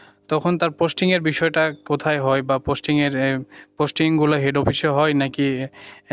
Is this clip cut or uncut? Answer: uncut